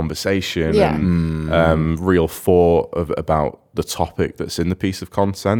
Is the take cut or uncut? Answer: uncut